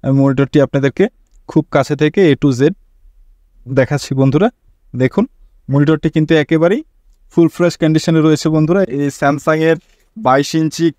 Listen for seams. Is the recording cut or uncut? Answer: cut